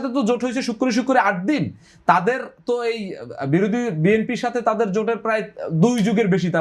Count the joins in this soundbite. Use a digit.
0